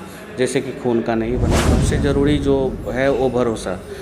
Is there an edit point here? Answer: yes; 1 cut; at 1.6 s

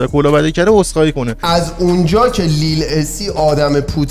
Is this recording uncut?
no; 1 cut; at 1.4 s

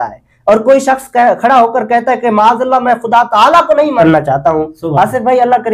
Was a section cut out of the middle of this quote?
yes; 1 cut; at 4.0 s

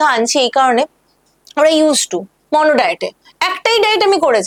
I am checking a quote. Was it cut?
no; 0 cuts

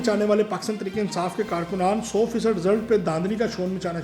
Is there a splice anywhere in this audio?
no; 0 cuts

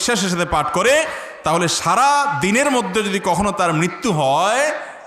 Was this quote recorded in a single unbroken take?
yes; 0 cuts

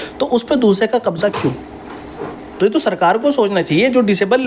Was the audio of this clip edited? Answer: no; 0 cuts

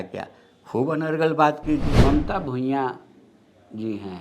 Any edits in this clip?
yes; 1 cut; at 1.9 s

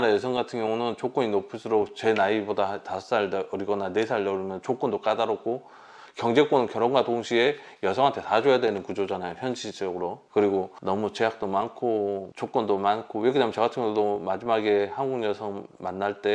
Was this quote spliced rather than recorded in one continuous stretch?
no; 0 cuts

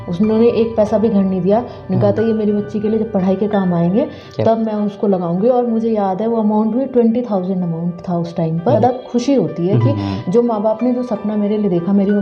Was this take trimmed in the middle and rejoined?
yes; 1 cut; at 8.8 s

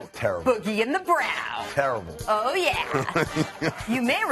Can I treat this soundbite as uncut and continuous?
no; 1 cut; at 2.7 s

